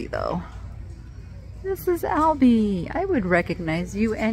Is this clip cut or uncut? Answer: uncut